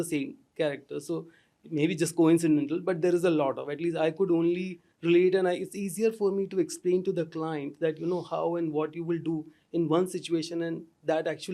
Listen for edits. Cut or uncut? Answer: uncut